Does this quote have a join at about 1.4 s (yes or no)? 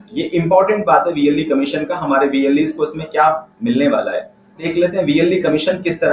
no